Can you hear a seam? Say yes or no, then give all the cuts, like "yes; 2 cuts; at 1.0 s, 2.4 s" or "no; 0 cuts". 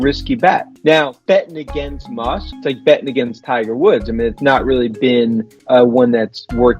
yes; 1 cut; at 1.2 s